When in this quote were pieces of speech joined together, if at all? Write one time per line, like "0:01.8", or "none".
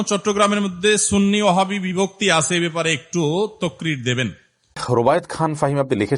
0:04.8